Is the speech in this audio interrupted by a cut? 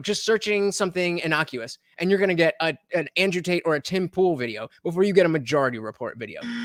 no; 0 cuts

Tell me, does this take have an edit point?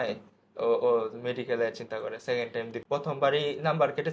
yes; 1 cut; at 2.7 s

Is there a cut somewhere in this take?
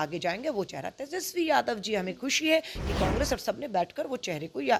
no; 0 cuts

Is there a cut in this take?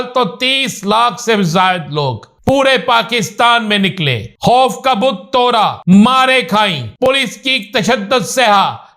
yes; 4 cuts; at 2.3 s, 4.2 s, 5.8 s, 7.1 s

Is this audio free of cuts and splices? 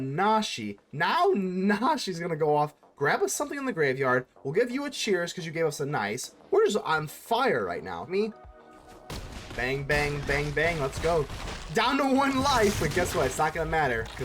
no; 1 cut; at 8.0 s

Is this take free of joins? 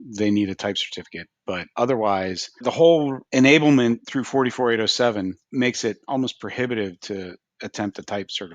no; 5 cuts; at 1.7 s, 2.6 s, 3.2 s, 4.1 s, 5.4 s

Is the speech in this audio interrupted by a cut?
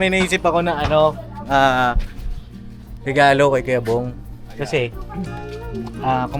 no; 0 cuts

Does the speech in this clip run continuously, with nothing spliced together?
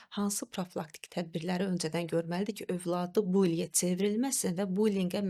yes; 0 cuts

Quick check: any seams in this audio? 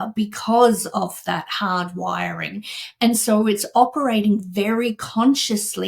no; 0 cuts

